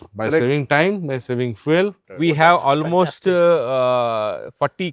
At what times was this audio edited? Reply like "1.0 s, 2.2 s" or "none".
2.0 s

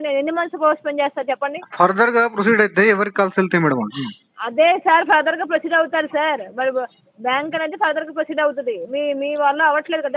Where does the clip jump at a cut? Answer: none

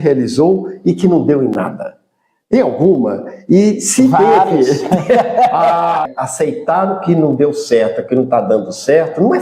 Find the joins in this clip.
6.1 s

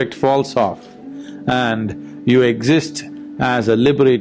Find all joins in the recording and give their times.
none

